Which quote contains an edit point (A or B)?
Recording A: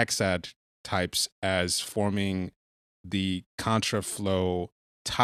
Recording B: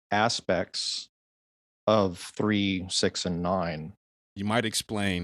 B